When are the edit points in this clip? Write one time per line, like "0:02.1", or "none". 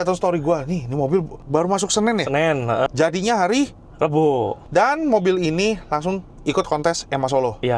0:02.9
0:04.6